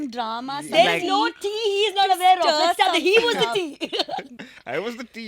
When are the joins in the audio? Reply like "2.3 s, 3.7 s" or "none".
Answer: 4.4 s

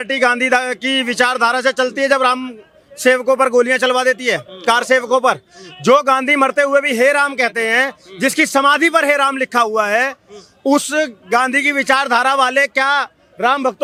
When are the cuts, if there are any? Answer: none

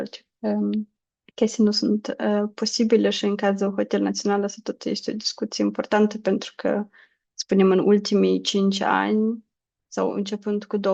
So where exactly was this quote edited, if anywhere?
none

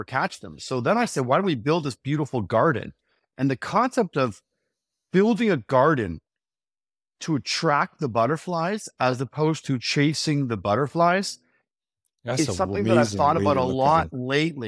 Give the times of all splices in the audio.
none

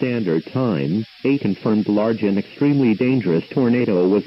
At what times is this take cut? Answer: 2.0 s

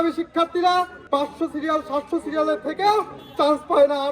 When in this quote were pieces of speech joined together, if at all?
1.0 s

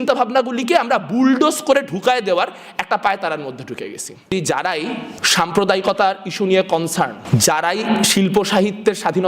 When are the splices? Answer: 4.3 s, 5.1 s, 7.2 s

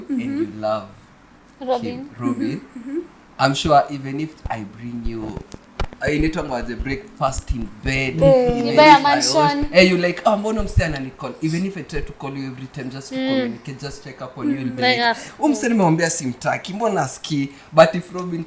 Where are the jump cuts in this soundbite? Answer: none

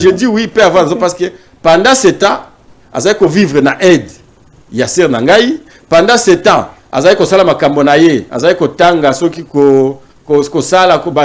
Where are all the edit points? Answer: none

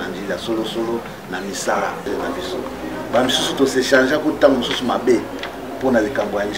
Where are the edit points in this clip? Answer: 2.1 s

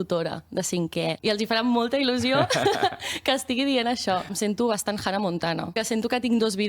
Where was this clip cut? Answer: 1.2 s, 4.3 s, 5.8 s

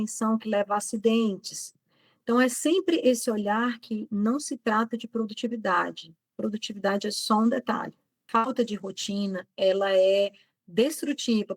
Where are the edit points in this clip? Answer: 8.1 s

